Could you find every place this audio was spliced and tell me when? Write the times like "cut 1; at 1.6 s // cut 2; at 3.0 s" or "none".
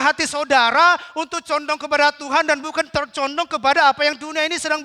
none